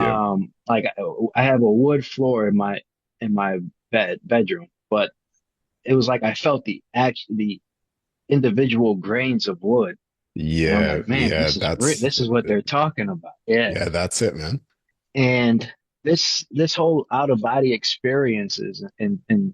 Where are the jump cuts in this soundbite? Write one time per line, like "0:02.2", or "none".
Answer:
0:14.6